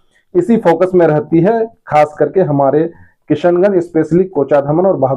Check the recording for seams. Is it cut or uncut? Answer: uncut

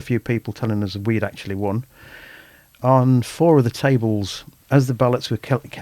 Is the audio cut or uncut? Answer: uncut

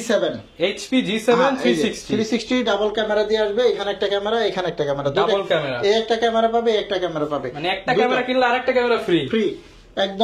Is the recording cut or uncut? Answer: uncut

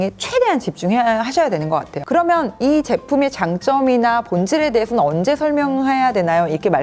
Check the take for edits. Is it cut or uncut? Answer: uncut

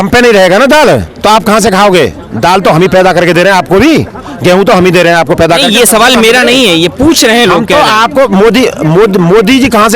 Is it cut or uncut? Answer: uncut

